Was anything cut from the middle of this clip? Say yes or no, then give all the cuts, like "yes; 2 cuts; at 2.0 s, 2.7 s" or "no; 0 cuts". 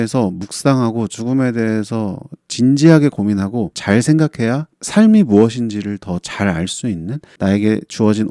no; 0 cuts